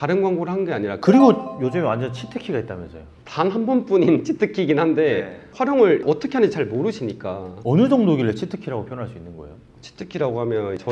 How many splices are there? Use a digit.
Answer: 1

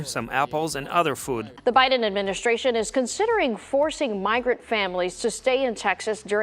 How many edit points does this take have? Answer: 1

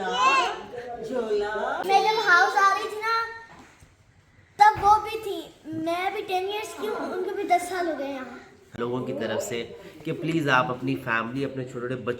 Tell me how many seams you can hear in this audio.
2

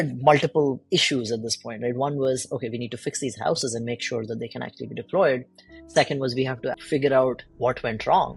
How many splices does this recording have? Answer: 3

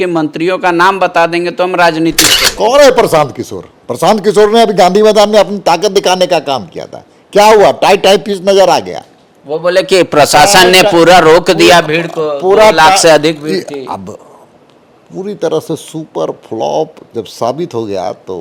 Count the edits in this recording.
0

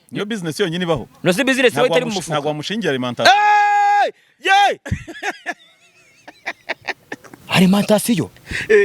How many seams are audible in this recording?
1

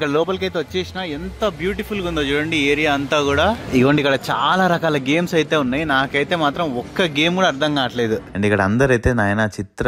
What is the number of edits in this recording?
2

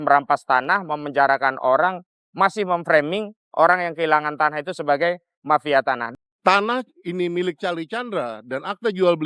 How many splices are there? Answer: 1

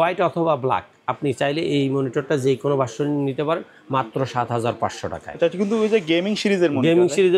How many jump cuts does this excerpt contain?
0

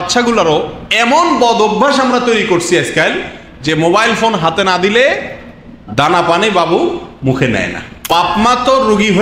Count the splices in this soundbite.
1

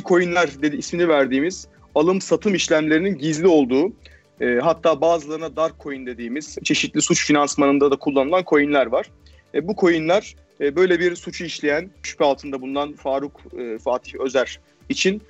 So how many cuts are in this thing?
2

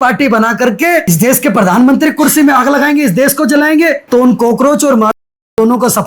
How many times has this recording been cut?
2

